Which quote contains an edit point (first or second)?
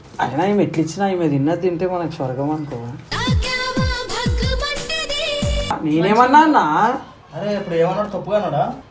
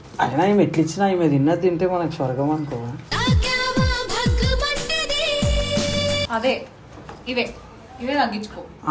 first